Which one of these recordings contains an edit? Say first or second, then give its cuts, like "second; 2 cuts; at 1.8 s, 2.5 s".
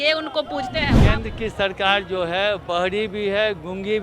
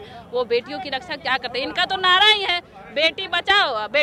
first; 1 cut; at 0.9 s